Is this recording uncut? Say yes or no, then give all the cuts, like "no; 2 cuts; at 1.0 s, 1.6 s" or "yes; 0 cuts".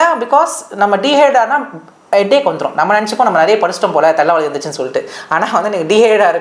yes; 0 cuts